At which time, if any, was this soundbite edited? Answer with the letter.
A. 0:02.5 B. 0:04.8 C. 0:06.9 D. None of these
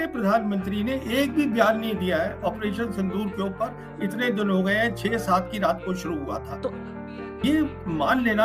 C